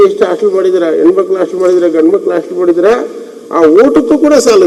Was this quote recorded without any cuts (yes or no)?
yes